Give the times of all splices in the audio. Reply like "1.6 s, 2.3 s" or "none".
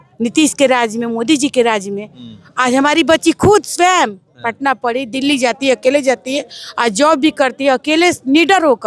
none

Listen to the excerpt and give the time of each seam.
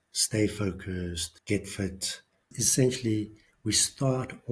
1.3 s, 2.6 s

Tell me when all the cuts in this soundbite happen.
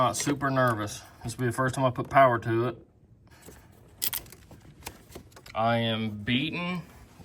3.3 s, 5.5 s

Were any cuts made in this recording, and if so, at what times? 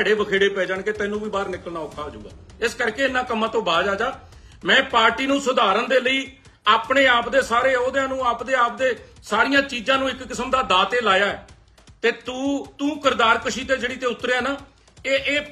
none

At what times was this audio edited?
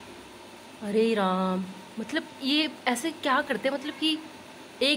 1.8 s

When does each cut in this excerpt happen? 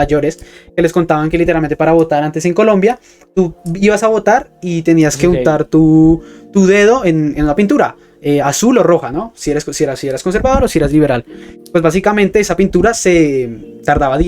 none

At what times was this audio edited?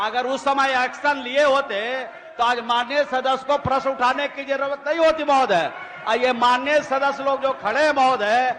none

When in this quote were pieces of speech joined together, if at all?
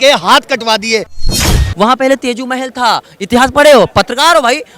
1.1 s

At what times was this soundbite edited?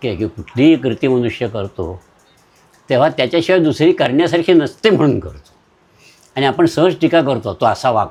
none

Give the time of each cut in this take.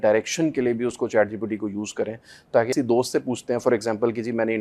2.7 s

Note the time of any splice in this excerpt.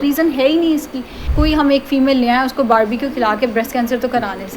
1.3 s

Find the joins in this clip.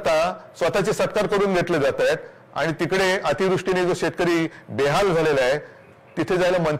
none

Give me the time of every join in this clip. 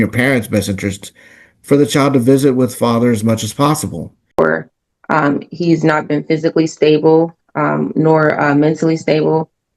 4.4 s

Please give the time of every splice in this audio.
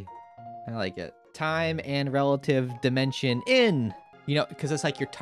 1.2 s, 4.1 s

